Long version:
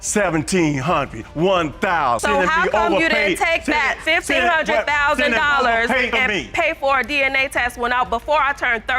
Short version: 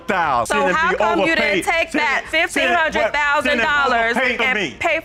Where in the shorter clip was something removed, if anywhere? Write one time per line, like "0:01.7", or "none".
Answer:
none

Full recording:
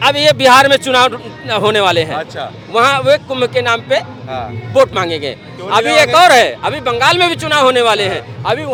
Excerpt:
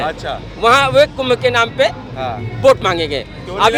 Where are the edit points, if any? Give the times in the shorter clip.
none

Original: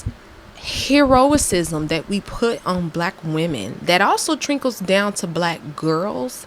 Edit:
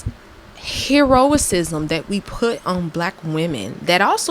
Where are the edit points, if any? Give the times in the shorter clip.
none

